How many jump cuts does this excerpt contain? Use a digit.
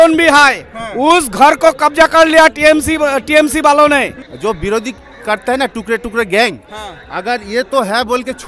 1